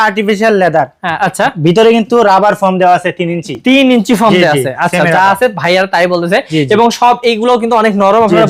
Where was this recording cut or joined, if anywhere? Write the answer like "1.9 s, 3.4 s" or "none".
none